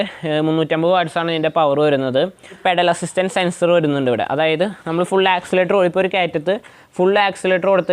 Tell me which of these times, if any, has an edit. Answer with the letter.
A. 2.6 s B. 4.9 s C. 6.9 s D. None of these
A